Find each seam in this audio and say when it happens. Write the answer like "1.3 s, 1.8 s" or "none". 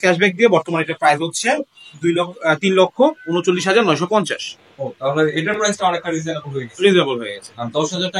none